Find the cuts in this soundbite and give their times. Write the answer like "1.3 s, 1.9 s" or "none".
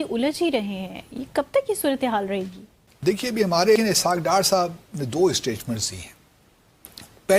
3.8 s